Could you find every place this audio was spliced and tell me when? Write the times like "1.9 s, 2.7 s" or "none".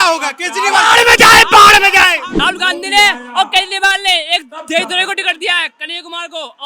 2.3 s